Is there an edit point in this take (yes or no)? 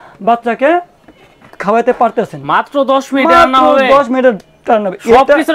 no